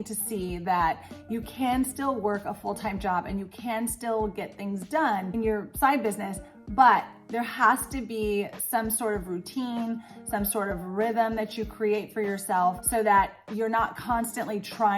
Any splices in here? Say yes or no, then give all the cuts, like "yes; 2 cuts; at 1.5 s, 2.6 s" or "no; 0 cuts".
yes; 2 cuts; at 5.3 s, 12.8 s